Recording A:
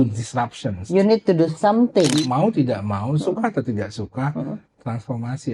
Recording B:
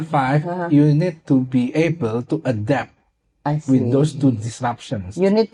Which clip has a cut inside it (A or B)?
A